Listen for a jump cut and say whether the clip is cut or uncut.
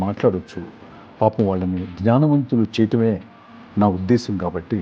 uncut